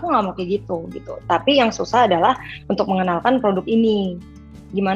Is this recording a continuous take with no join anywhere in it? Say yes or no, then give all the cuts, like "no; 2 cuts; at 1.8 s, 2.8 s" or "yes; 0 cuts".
no; 1 cut; at 1.1 s